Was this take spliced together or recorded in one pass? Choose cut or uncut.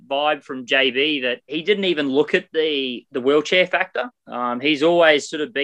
cut